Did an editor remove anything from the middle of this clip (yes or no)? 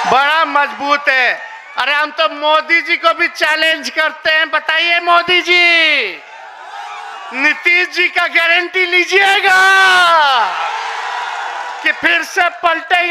no